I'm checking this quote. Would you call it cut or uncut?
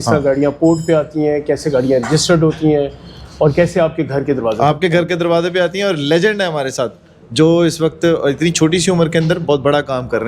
uncut